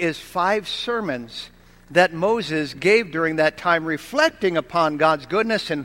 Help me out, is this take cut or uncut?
uncut